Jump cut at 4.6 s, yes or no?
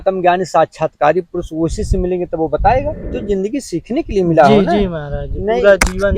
no